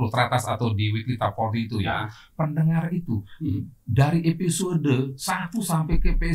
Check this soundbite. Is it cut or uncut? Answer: uncut